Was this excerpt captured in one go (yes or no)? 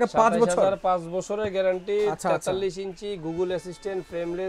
yes